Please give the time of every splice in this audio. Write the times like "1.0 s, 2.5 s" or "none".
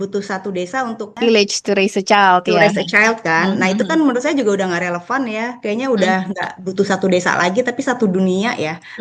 1.2 s